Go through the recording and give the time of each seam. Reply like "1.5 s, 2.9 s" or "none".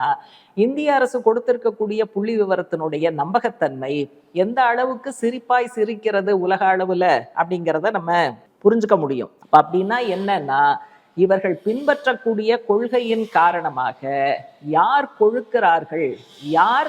8.5 s, 9.3 s